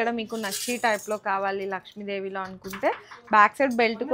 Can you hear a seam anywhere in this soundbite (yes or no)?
no